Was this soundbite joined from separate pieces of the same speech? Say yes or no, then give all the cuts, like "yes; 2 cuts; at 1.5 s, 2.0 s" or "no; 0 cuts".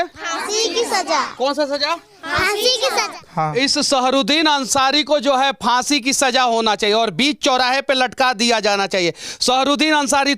yes; 1 cut; at 3.2 s